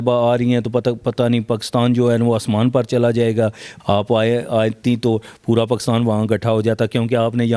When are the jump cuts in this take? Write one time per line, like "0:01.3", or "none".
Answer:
0:03.7